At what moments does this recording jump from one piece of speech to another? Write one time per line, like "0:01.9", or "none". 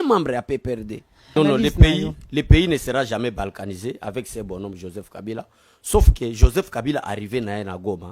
0:01.4